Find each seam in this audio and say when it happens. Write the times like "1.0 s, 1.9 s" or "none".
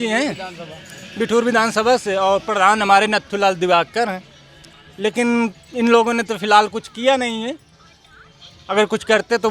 none